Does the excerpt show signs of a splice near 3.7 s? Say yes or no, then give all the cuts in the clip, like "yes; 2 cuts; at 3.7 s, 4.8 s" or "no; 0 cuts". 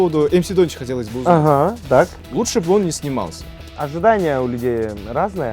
yes; 2 cuts; at 2.2 s, 3.7 s